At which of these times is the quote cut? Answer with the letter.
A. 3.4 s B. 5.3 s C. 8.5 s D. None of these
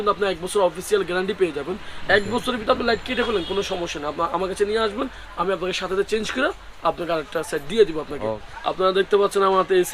C